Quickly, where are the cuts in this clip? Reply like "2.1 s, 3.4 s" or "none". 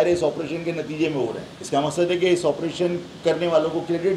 1.5 s